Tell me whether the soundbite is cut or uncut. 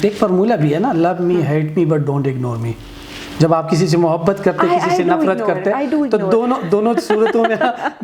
uncut